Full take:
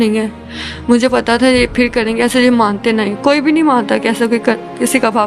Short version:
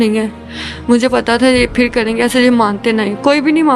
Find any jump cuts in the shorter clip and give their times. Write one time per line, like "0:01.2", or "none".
none